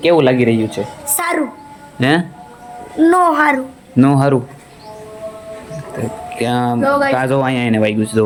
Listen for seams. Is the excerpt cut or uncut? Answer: uncut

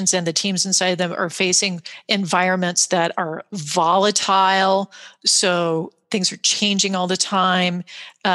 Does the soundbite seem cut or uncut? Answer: uncut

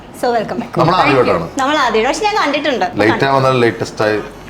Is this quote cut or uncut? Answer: cut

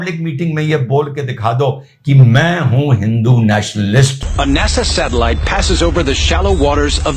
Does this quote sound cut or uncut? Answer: cut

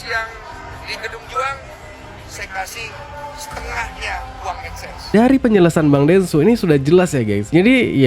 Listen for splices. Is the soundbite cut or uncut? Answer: cut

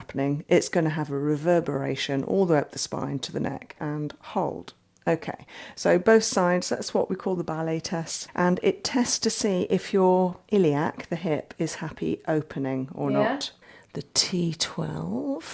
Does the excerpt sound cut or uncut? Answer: cut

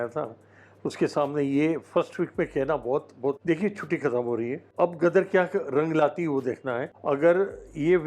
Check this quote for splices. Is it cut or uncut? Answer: cut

